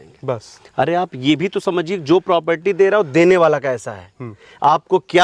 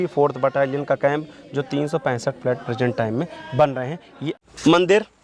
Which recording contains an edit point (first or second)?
second